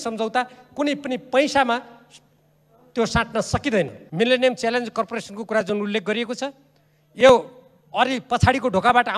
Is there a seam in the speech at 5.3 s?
no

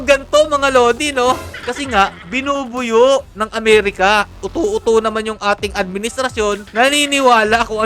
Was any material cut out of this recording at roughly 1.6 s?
yes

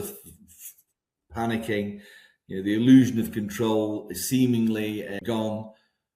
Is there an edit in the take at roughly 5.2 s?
yes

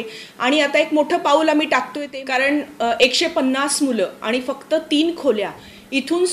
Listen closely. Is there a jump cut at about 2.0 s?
yes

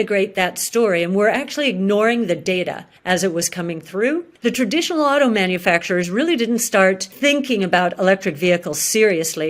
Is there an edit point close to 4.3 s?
yes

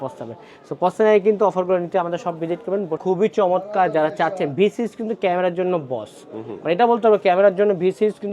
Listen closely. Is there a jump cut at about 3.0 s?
yes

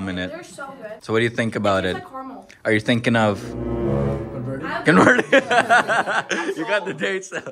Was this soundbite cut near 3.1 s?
no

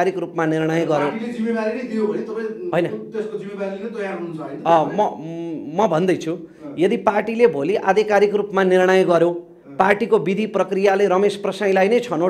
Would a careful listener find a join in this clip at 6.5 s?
no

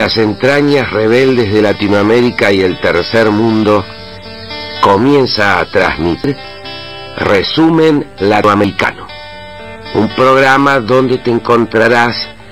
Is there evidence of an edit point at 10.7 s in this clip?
no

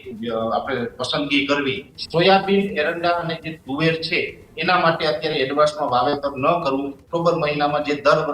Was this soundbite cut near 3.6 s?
no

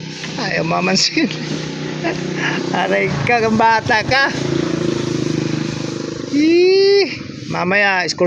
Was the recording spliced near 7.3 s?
no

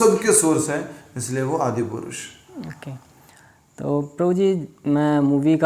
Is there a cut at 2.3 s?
no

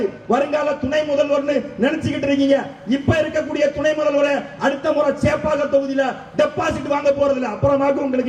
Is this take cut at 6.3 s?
no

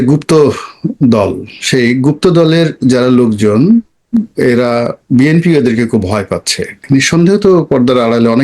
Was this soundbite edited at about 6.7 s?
yes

